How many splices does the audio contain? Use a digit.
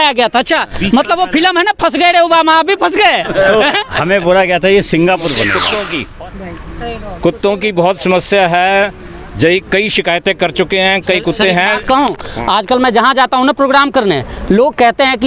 1